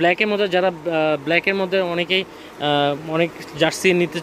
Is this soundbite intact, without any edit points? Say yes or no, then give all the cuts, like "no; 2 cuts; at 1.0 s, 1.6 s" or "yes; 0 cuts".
yes; 0 cuts